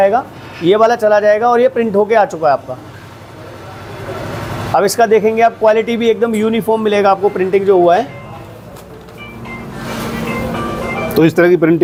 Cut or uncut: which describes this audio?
uncut